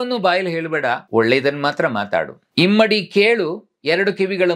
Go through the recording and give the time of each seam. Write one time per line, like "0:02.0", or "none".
0:01.0
0:02.4